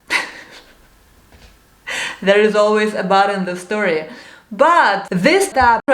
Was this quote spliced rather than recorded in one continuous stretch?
no; 0 cuts

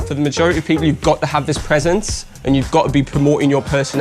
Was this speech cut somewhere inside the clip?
no; 0 cuts

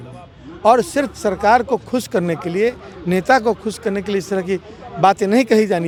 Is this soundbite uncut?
yes; 0 cuts

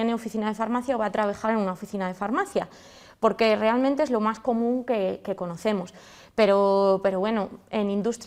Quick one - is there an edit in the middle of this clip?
no; 0 cuts

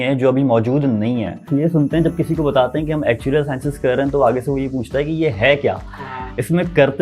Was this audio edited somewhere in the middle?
yes; 1 cut; at 1.5 s

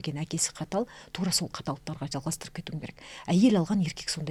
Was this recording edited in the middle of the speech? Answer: no; 0 cuts

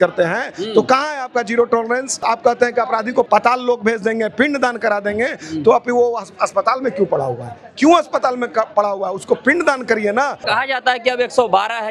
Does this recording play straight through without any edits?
no; 3 cuts; at 2.2 s, 3.3 s, 10.4 s

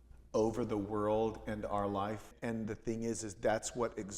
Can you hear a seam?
yes; 1 cut; at 2.3 s

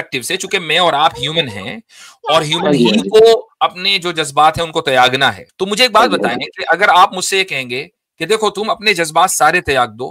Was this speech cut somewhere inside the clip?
yes; 1 cut; at 5.5 s

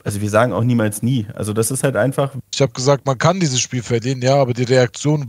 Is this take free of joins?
no; 1 cut; at 2.3 s

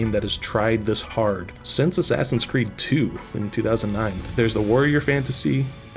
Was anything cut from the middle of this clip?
yes; 2 cuts; at 1.6 s, 4.2 s

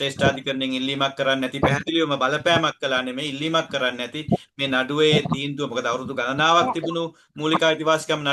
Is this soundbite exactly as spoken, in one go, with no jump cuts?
yes; 0 cuts

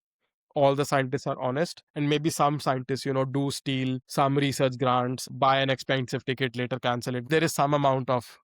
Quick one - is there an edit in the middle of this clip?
yes; 4 cuts; at 1.8 s, 4.0 s, 5.2 s, 7.3 s

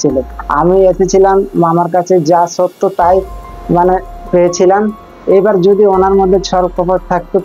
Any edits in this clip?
no; 0 cuts

